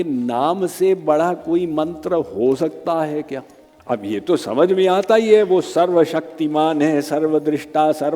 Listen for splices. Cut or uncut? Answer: cut